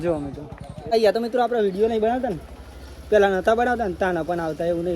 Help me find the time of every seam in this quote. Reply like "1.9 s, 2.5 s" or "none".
0.9 s